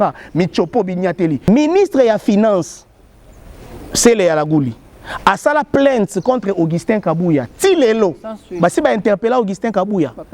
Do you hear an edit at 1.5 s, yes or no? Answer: yes